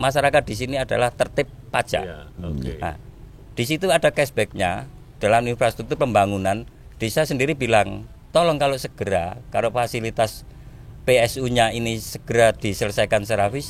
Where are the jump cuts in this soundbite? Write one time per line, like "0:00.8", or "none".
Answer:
none